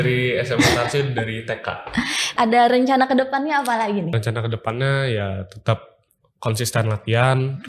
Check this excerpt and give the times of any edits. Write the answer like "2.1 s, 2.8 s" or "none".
2.3 s, 4.1 s